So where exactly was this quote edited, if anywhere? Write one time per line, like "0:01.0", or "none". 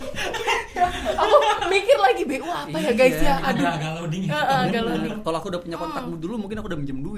none